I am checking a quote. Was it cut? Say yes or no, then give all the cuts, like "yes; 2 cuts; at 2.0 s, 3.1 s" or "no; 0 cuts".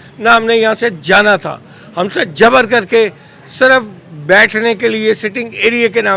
no; 0 cuts